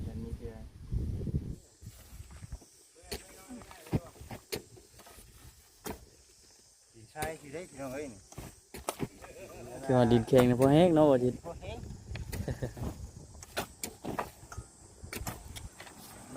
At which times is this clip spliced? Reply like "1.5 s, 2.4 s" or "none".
1.6 s